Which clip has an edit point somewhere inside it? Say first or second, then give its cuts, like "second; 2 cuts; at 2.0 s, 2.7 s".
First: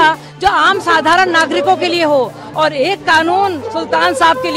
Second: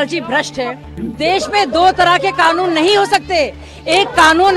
second; 1 cut; at 1.1 s